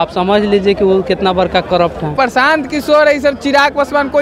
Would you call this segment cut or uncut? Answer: cut